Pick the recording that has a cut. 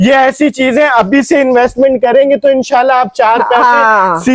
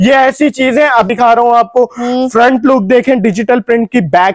second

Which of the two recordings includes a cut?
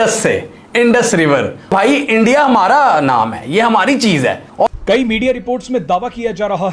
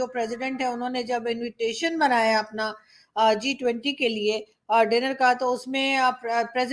first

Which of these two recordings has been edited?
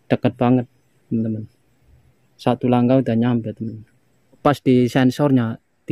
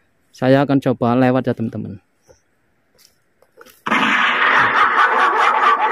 first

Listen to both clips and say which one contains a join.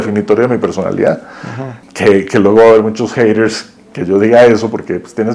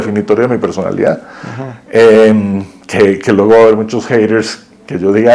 first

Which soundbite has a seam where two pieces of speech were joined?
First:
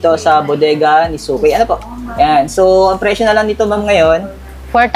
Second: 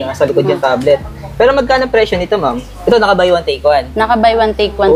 second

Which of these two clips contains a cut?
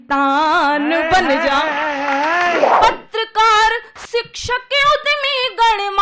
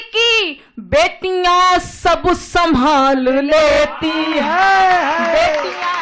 first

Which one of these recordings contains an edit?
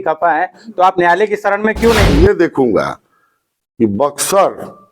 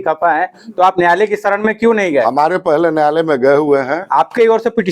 first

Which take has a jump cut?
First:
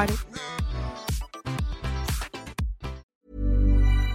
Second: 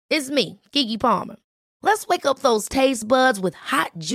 first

